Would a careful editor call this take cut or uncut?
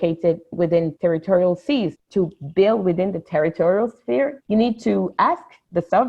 uncut